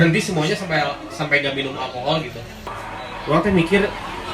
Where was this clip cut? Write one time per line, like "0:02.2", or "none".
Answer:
0:02.7